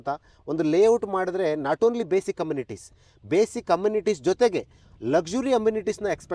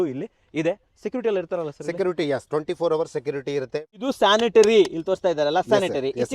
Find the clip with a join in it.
second; 1 cut; at 4.0 s

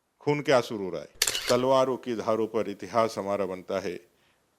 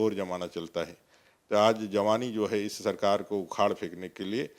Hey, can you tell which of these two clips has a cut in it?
first; 1 cut; at 1.3 s

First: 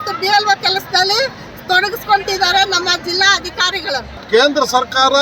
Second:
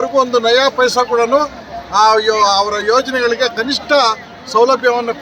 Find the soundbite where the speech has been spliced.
first; 1 cut; at 4.1 s

